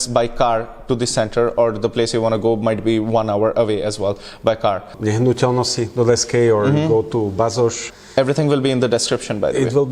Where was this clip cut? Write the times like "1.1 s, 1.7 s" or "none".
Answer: 4.9 s, 7.9 s